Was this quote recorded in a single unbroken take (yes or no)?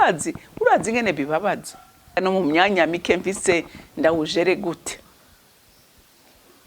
no